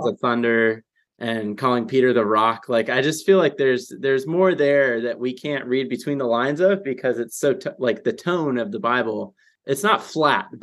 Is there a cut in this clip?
yes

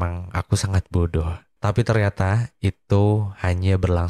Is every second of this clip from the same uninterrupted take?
no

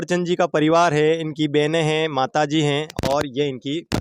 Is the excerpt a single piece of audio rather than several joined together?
yes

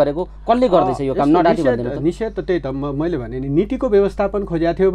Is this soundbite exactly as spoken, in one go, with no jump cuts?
yes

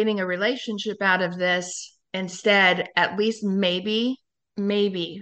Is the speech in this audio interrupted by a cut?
no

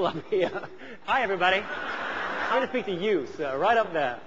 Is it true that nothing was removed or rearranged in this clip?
no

